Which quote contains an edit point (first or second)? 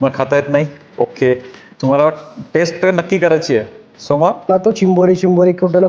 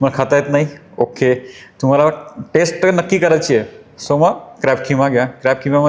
first